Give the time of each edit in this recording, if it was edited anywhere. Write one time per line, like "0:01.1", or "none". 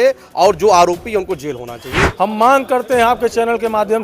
0:02.0